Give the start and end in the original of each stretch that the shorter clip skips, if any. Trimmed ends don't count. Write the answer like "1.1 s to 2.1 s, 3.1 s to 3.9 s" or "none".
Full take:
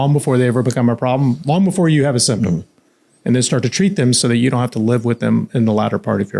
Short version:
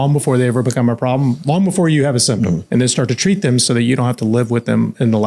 2.6 s to 3.2 s

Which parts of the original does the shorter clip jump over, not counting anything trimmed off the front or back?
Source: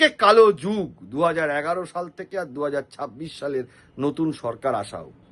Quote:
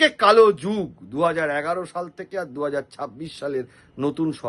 none

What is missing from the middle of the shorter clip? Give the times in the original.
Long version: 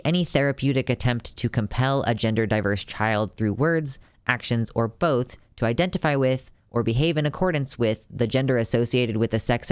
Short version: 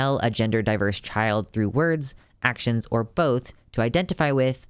none

